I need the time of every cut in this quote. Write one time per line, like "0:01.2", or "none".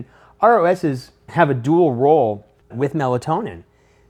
none